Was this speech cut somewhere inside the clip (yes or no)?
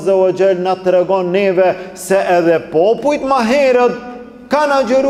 no